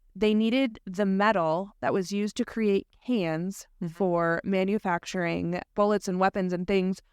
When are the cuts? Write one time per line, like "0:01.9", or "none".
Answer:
0:05.6